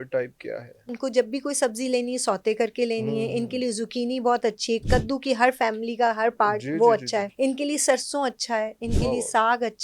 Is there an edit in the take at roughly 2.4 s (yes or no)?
no